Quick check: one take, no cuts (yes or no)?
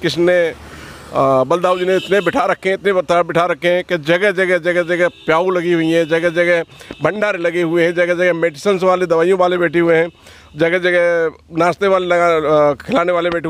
yes